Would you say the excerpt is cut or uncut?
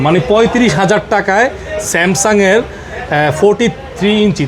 uncut